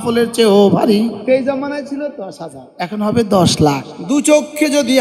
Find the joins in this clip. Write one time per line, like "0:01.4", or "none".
0:01.2
0:03.9